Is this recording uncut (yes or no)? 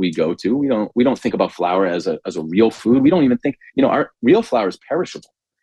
yes